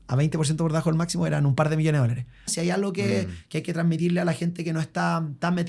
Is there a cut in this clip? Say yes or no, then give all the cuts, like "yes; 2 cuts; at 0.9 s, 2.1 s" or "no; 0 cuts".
yes; 1 cut; at 2.5 s